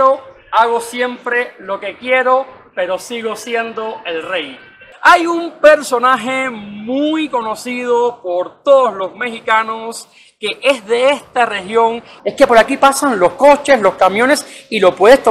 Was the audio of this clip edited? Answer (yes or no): yes